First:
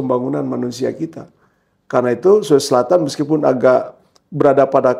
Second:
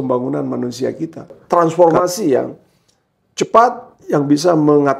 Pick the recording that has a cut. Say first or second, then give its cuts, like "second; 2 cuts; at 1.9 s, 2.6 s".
second; 1 cut; at 1.4 s